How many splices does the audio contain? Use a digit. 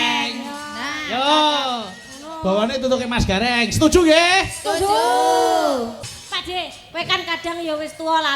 1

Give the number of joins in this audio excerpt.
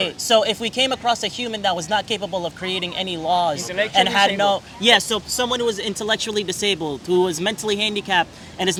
0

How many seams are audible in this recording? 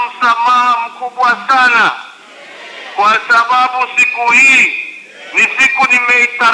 1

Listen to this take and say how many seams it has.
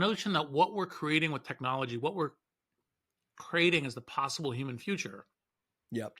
0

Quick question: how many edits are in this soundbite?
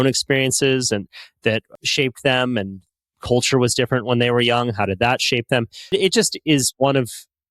2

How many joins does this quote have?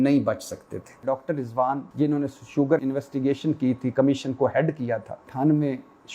4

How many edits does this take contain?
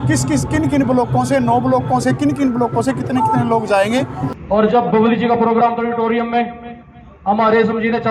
1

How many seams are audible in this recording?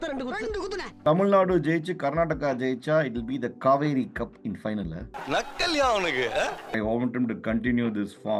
2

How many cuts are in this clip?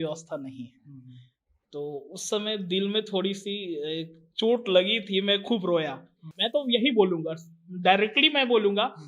1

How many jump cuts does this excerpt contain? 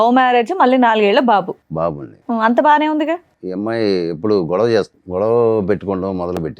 2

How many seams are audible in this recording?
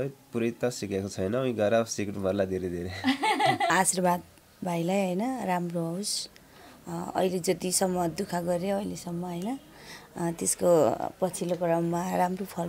1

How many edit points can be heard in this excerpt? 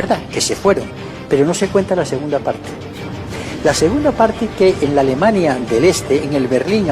1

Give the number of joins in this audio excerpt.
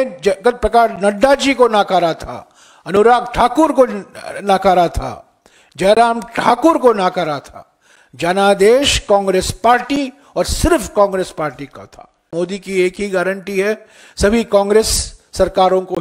1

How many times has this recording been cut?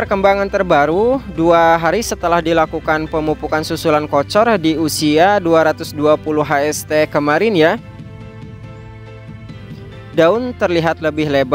0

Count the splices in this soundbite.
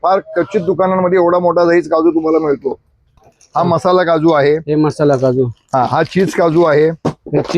1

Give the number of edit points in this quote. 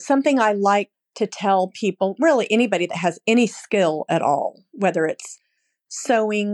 1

